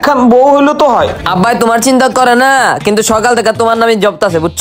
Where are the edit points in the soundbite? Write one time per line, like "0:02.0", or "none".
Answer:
0:01.2